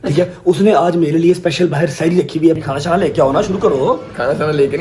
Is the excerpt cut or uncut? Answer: cut